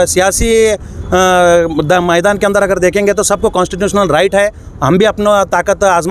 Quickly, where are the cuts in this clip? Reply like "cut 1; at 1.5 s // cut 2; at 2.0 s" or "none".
none